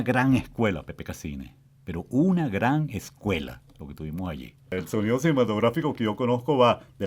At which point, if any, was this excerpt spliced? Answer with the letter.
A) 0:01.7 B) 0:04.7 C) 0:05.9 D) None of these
B